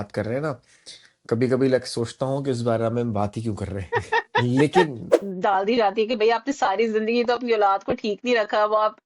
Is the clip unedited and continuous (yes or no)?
no